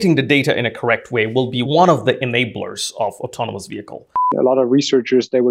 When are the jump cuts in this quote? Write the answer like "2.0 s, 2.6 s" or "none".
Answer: 1.6 s, 4.3 s